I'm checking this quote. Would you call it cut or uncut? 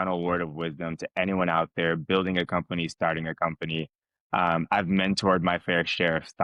uncut